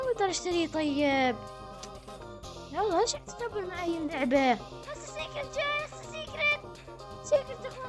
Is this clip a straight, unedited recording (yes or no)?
yes